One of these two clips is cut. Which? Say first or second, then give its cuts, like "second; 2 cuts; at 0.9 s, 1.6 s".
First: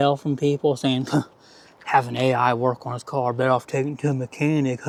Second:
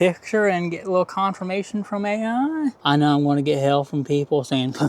second; 1 cut; at 2.8 s